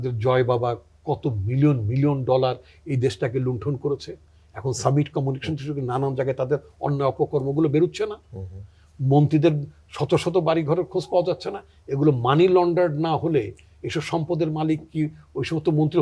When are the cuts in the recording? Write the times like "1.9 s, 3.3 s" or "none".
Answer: none